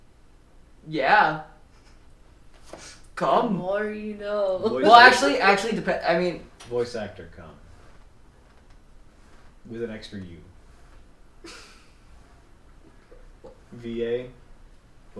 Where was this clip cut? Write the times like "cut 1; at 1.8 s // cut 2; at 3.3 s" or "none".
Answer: none